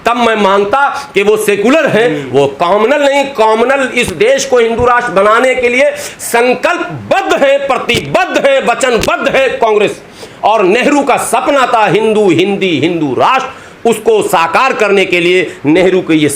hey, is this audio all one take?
yes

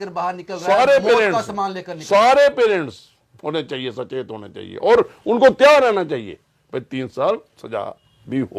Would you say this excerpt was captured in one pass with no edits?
yes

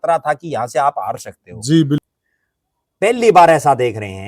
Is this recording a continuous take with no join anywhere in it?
no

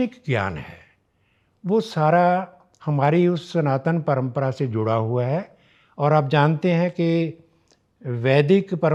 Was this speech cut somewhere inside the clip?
no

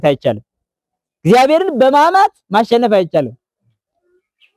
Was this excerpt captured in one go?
yes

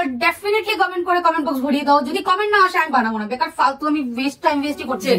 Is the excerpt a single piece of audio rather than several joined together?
yes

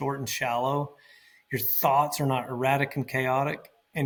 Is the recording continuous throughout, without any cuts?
yes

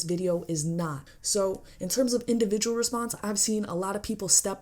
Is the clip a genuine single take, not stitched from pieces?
no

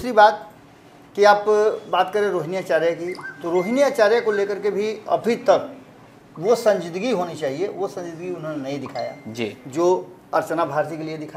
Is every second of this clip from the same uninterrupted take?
yes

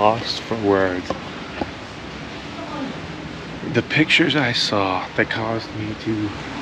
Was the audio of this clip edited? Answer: no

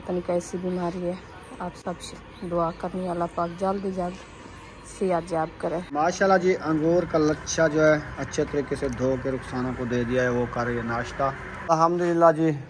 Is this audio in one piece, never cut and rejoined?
no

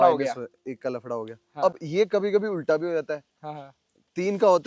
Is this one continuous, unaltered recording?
yes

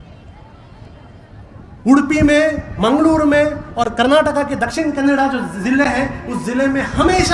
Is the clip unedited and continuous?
yes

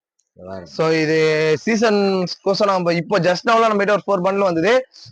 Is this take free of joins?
yes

